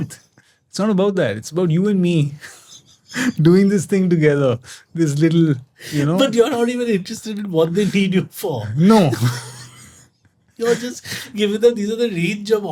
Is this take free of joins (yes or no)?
yes